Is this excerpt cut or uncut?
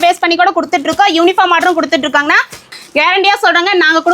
cut